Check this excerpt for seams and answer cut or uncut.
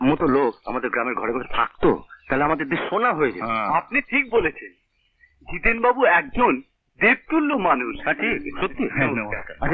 uncut